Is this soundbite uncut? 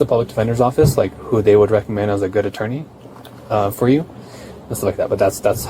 yes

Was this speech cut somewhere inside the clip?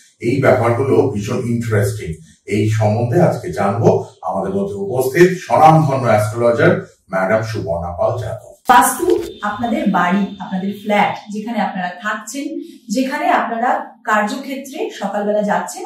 yes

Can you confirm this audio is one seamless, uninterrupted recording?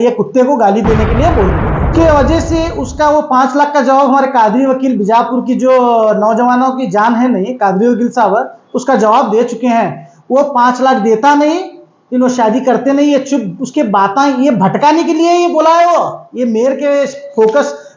no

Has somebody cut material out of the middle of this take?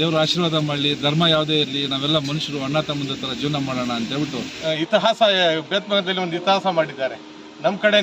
yes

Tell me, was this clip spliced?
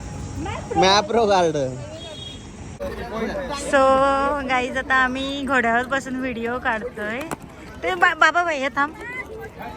yes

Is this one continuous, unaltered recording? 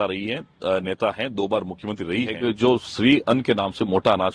no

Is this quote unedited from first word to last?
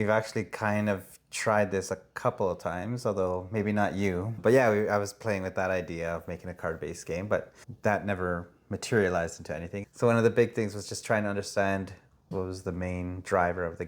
no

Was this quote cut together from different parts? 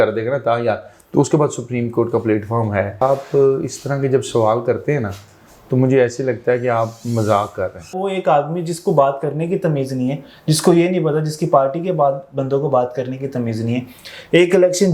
yes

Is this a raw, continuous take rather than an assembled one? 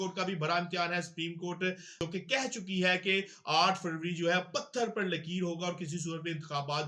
no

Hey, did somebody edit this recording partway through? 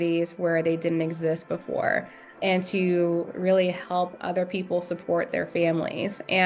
no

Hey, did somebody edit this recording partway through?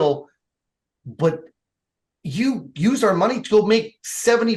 no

